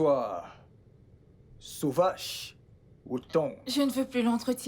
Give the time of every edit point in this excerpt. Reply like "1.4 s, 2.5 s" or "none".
3.6 s